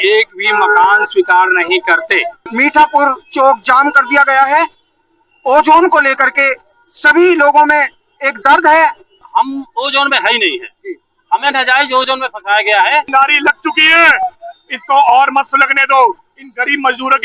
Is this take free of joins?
no; 3 cuts; at 2.5 s, 9.2 s, 13.1 s

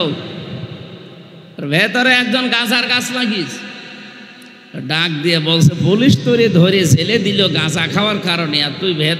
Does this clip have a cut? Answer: no; 0 cuts

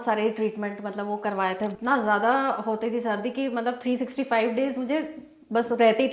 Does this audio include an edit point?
yes; 1 cut; at 1.7 s

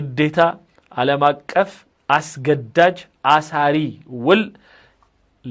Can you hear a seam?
no; 0 cuts

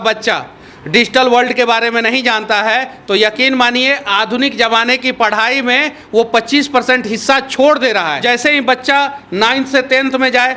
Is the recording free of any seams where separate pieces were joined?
no; 1 cut; at 8.2 s

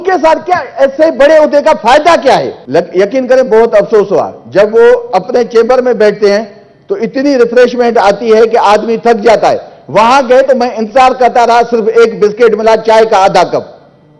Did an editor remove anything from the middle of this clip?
yes; 1 cut; at 2.5 s

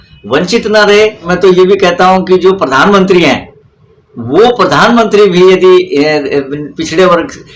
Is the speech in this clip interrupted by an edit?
yes; 1 cut; at 1.3 s

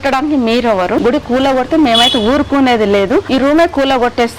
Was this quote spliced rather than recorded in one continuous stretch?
yes; 2 cuts; at 1.0 s, 3.3 s

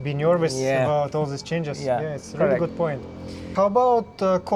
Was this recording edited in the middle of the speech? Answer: no; 0 cuts

